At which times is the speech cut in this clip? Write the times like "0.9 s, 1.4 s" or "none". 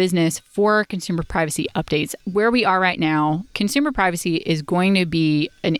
2.1 s, 3.5 s